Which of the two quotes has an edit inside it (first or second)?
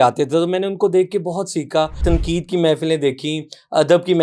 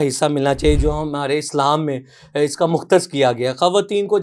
first